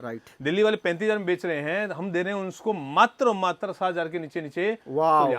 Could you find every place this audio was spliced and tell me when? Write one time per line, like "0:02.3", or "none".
none

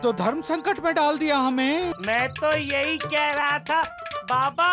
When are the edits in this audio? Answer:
0:01.9

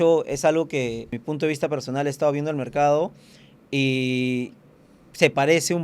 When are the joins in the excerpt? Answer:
0:01.2

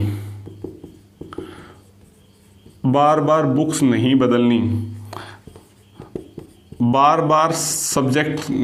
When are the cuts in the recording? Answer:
none

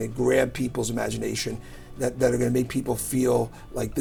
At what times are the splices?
none

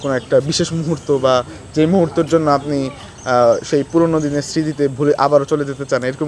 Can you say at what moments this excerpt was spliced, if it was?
none

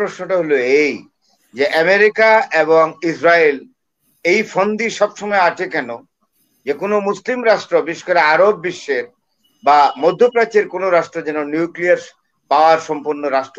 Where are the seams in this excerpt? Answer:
none

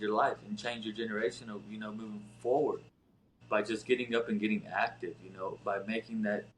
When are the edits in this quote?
none

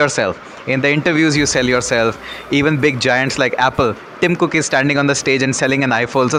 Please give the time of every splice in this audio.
none

